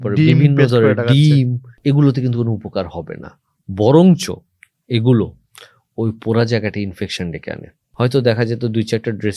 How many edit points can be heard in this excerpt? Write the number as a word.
one